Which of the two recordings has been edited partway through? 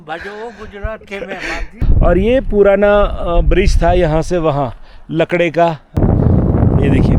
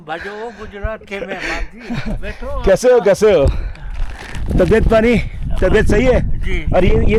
first; 2 cuts; at 1.8 s, 6.0 s

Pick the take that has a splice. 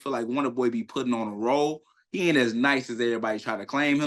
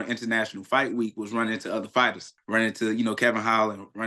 second; 1 cut; at 2.3 s

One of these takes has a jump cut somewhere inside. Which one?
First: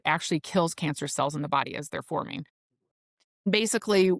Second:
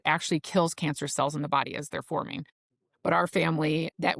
first; 1 cut; at 3.1 s

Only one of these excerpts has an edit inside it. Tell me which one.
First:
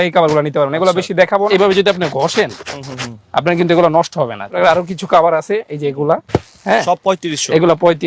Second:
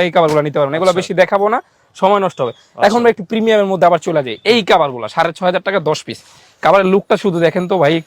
first; 2 cuts; at 1.5 s, 4.5 s

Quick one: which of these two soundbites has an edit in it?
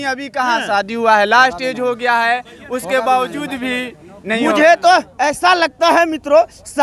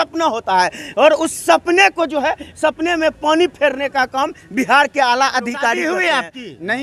second; 1 cut; at 5.8 s

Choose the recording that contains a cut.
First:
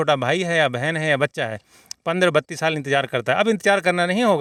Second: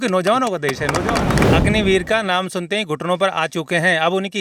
second; 1 cut; at 1.4 s

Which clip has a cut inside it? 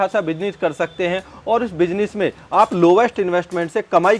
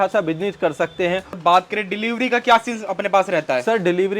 second; 1 cut; at 1.4 s

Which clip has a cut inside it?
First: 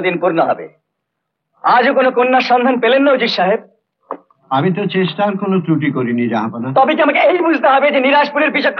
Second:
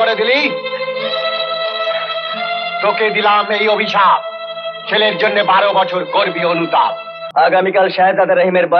second; 1 cut; at 7.2 s

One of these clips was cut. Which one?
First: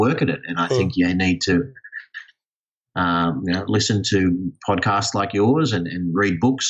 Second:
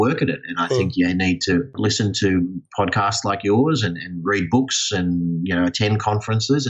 second; 1 cut; at 1.7 s

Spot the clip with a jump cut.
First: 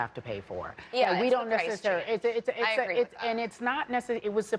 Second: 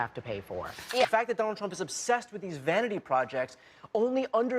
second; 1 cut; at 1.1 s

